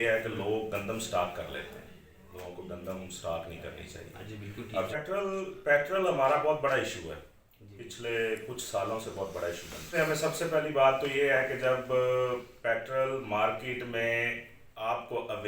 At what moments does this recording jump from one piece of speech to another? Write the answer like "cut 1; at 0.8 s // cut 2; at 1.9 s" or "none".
cut 1; at 4.9 s // cut 2; at 9.9 s